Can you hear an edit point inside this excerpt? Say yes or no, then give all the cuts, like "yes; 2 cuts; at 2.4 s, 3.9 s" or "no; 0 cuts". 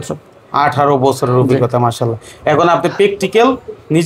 no; 0 cuts